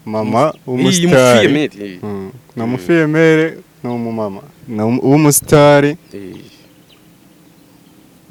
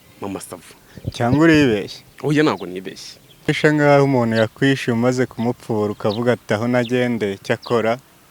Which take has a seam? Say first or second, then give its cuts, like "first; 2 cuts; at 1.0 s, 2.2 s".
second; 1 cut; at 3.6 s